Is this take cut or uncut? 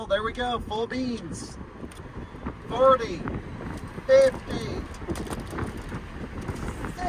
uncut